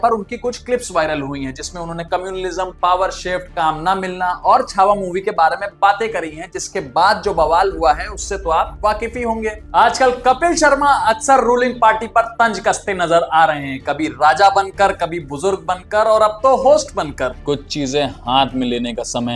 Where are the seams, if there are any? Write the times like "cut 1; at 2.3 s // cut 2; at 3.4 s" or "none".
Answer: cut 1; at 9.6 s // cut 2; at 17.3 s